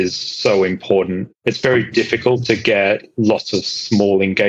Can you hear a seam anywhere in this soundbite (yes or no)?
yes